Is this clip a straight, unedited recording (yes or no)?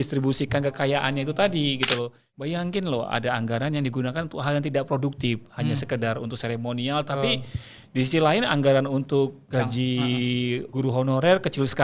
no